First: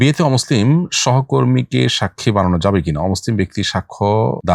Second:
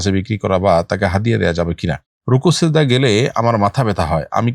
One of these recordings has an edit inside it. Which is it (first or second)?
second